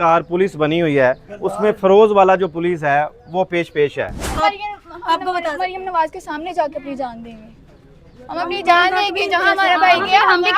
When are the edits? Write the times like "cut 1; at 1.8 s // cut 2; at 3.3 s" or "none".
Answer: cut 1; at 4.3 s